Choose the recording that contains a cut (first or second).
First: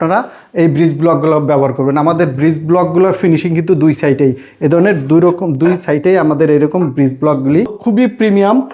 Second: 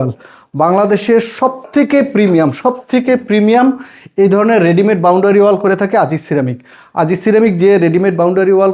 first